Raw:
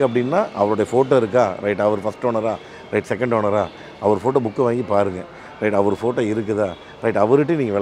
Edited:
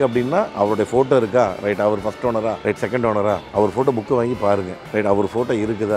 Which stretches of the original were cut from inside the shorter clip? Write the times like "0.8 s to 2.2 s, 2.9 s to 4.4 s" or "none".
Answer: 2.6 s to 2.9 s, 3.7 s to 3.9 s, 5.2 s to 5.4 s